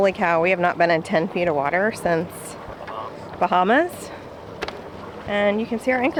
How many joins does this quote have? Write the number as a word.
zero